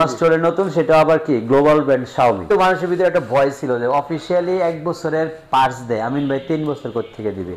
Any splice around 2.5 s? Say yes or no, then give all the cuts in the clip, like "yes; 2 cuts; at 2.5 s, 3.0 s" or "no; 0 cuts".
yes; 1 cut; at 2.5 s